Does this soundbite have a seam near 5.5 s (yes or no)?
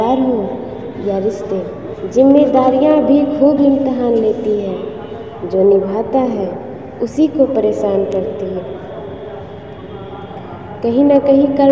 no